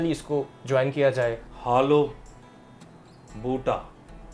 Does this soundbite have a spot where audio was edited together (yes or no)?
yes